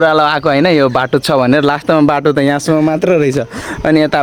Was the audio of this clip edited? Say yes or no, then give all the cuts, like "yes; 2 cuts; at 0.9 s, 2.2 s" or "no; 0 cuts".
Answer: no; 0 cuts